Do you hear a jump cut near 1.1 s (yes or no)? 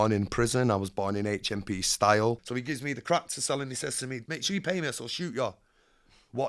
no